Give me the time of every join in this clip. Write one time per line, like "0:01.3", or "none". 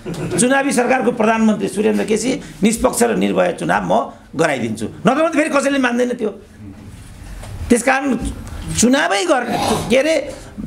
none